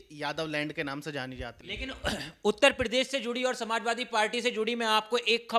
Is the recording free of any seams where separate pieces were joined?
no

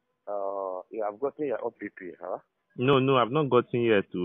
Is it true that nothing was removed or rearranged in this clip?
no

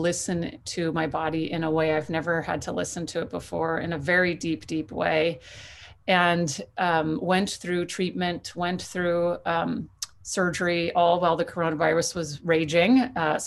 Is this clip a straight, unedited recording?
yes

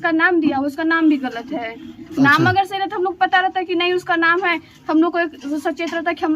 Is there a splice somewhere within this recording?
no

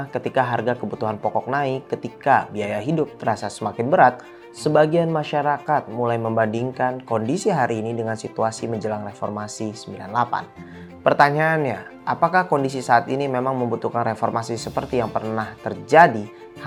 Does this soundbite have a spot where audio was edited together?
no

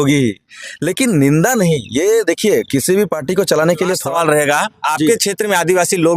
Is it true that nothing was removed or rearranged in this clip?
no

